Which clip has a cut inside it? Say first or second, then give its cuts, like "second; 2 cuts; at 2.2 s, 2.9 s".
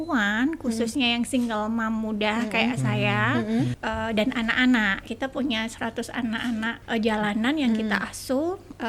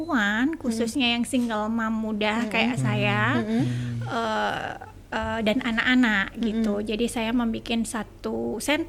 first; 3 cuts; at 3.8 s, 5.0 s, 6.8 s